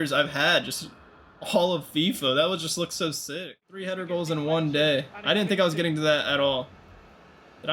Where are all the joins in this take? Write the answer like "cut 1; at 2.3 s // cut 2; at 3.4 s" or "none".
cut 1; at 3.3 s

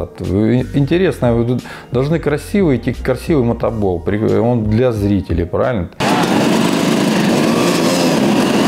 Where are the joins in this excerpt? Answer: none

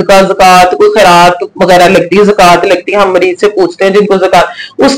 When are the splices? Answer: none

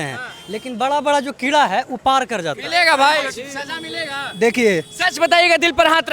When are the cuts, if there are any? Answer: none

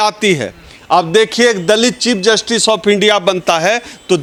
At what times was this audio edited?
none

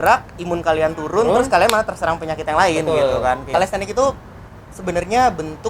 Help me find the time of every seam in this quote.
cut 1; at 3.5 s

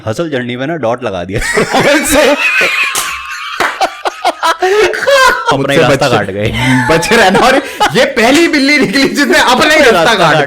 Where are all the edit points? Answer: cut 1; at 5.5 s

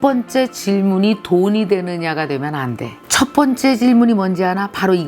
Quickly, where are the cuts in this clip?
cut 1; at 3.0 s

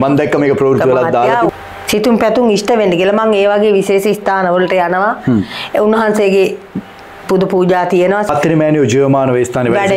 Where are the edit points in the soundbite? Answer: cut 1; at 1.5 s // cut 2; at 8.3 s

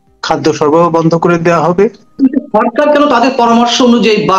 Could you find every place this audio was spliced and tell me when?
cut 1; at 2.2 s

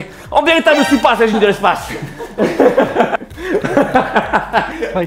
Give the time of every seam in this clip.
cut 1; at 3.3 s

